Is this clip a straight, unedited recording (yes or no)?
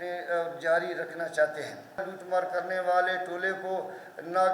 no